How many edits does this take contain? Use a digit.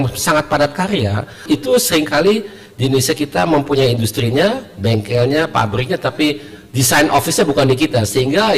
1